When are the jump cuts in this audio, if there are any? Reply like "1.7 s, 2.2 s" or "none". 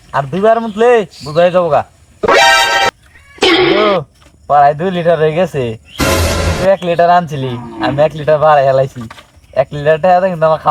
none